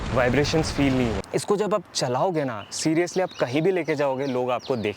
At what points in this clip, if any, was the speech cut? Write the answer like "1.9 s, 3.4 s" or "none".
1.1 s